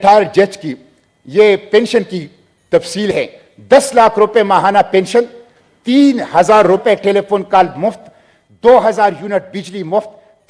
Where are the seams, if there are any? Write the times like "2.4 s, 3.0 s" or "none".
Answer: none